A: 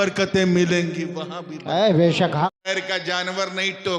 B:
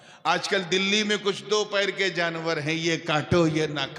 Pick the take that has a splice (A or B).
A